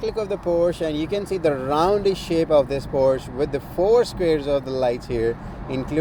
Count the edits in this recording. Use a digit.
0